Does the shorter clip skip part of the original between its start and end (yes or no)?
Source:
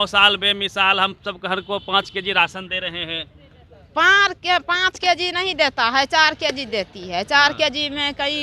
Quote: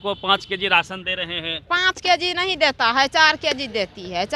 yes